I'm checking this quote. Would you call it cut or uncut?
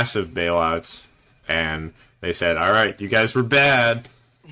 uncut